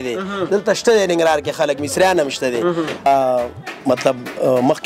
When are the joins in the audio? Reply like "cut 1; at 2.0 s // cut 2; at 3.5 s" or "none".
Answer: cut 1; at 3.1 s